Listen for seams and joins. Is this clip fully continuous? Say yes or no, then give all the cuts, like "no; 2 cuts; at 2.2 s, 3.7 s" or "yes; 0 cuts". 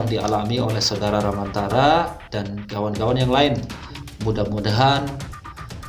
no; 1 cut; at 4.1 s